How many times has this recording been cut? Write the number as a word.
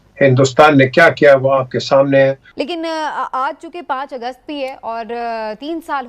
one